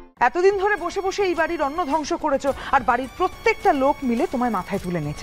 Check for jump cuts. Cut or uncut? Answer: uncut